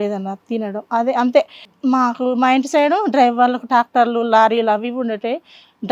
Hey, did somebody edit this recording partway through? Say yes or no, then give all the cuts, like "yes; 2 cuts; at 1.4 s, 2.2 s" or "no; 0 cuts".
yes; 1 cut; at 1.6 s